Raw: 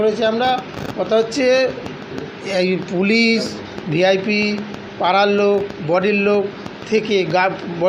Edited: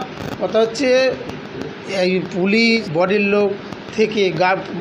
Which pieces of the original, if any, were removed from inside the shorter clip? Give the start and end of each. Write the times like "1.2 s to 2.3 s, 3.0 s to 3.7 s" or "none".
3.4 s to 5.8 s